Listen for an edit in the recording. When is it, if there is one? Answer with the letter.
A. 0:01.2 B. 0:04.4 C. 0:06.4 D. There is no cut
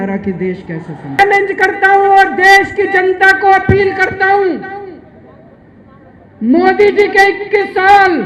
A